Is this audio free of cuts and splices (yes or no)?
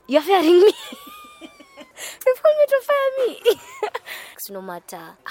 no